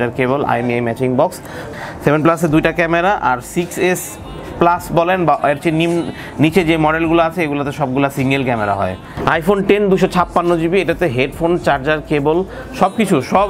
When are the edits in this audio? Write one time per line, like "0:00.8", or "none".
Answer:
0:01.6
0:09.1